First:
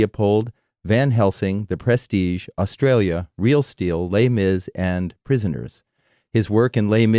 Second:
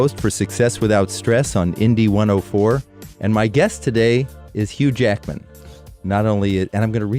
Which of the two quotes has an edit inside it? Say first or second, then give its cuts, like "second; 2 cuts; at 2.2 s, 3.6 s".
first; 1 cut; at 6.2 s